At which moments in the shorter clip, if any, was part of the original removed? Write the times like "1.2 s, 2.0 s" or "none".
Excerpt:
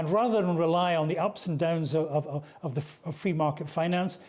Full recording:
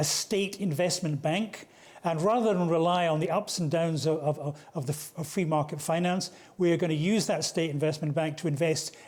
none